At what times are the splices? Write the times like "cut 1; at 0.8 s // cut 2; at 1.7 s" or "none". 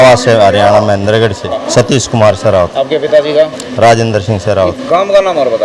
cut 1; at 1.5 s